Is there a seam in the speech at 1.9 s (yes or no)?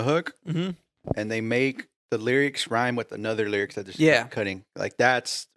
yes